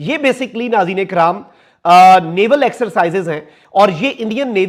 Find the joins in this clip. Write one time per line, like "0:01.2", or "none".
none